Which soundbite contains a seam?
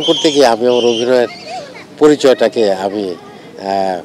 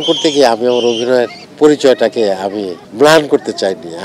second; 2 cuts; at 1.4 s, 2.8 s

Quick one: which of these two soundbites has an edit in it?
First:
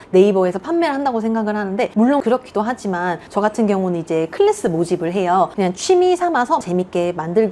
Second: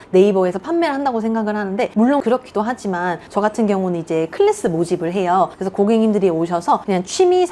first; 2 cuts; at 5.5 s, 6.6 s

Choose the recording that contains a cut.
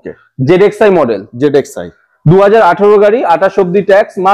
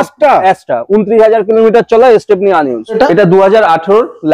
second; 1 cut; at 3.0 s

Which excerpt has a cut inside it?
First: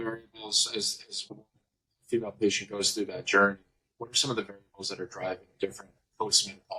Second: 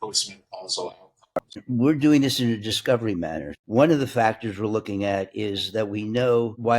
second; 2 cuts; at 1.6 s, 3.5 s

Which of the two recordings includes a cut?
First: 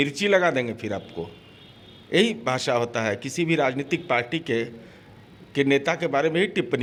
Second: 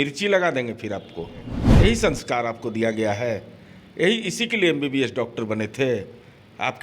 second; 1 cut; at 1.6 s

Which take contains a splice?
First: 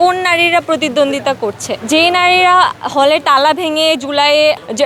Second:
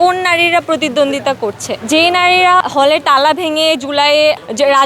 second; 1 cut; at 2.6 s

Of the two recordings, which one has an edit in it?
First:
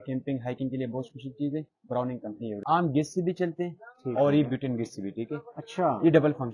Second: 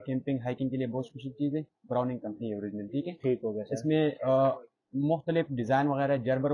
first; 1 cut; at 2.6 s

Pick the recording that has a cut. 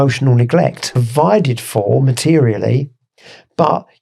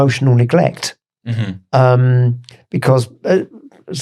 first; 1 cut; at 1.0 s

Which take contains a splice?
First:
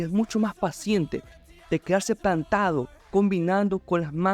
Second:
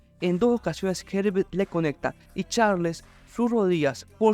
first; 1 cut; at 1.4 s

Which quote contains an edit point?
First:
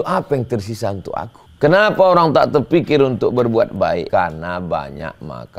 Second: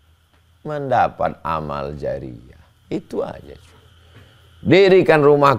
first; 2 cuts; at 1.4 s, 4.1 s

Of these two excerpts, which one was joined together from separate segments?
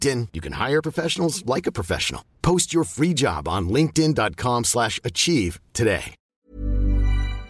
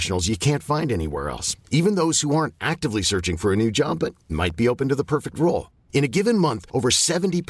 first; 1 cut; at 6.2 s

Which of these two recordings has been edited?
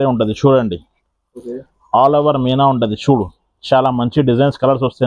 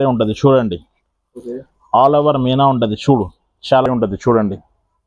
second; 1 cut; at 3.9 s

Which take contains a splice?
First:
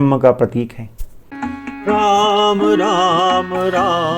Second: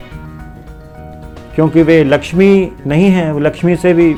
first; 1 cut; at 1.3 s

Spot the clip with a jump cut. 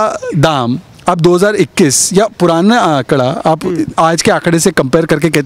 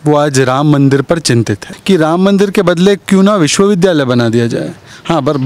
second; 1 cut; at 1.7 s

